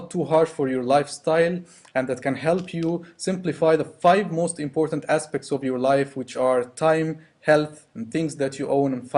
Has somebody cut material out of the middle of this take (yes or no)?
no